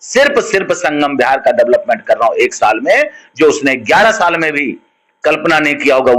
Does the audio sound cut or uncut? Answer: uncut